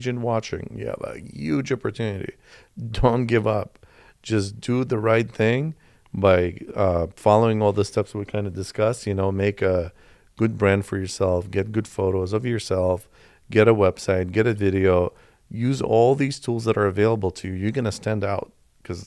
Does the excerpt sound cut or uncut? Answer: uncut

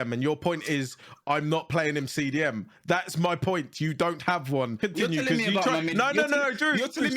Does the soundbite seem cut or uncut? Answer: cut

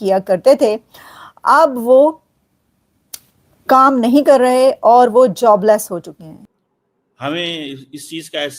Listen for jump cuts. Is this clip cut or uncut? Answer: cut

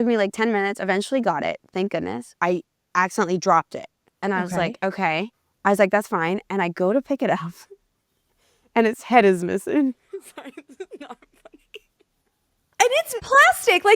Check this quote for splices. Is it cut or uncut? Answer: cut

